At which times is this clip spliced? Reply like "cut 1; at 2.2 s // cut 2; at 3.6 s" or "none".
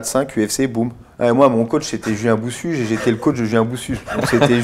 cut 1; at 1.0 s